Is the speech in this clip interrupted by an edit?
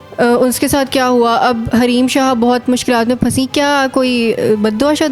no; 0 cuts

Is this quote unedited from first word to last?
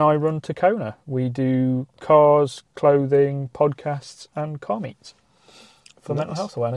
yes; 0 cuts

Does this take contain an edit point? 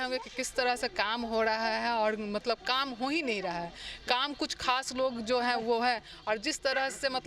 no; 0 cuts

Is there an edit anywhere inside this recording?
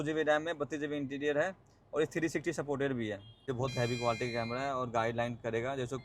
yes; 1 cut; at 3.4 s

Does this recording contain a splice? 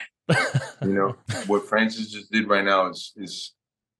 yes; 1 cut; at 1.3 s

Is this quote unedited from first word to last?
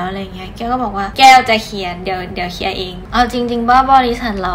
no; 2 cuts; at 1.1 s, 3.0 s

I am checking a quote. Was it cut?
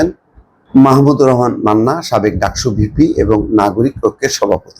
no; 0 cuts

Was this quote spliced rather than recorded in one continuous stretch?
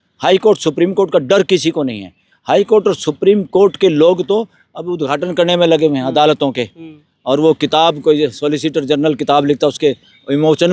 no; 0 cuts

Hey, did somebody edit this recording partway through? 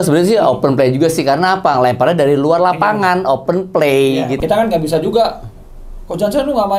yes; 1 cut; at 4.4 s

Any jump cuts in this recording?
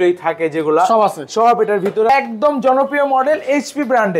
yes; 1 cut; at 2.1 s

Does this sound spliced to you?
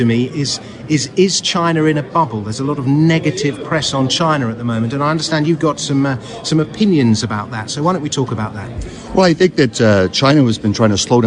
yes; 1 cut; at 3.4 s

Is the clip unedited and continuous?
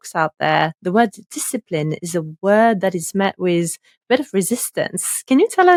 yes; 0 cuts

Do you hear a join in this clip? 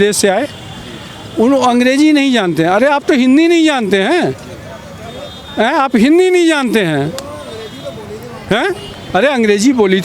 no; 0 cuts

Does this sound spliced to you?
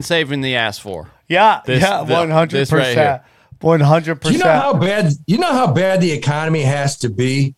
no; 0 cuts

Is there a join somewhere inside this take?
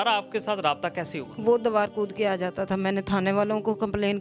no; 0 cuts

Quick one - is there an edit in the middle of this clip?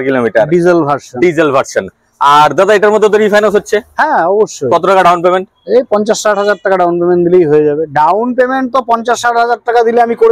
no; 0 cuts

